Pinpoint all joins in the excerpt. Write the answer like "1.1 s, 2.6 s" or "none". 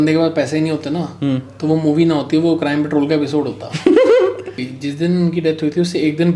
4.6 s

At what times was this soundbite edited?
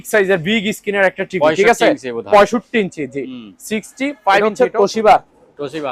4.4 s

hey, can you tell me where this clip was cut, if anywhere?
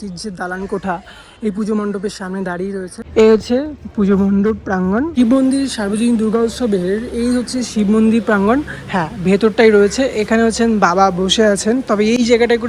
2.9 s, 5.1 s

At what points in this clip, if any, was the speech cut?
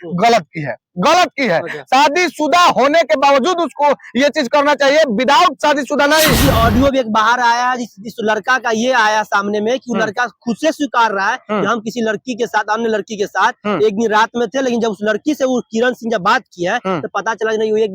6.4 s

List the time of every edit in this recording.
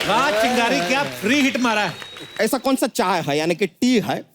2.2 s

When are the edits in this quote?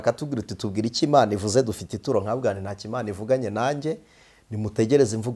none

